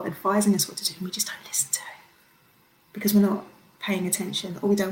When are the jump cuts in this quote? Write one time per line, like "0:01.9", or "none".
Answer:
none